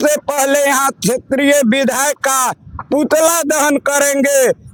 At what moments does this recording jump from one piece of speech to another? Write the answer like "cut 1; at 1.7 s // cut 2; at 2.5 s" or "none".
none